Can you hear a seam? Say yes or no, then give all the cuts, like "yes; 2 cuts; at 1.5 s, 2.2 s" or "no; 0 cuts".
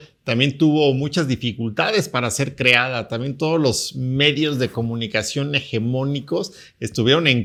no; 0 cuts